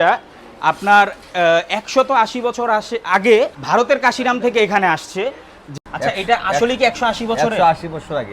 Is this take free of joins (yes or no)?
no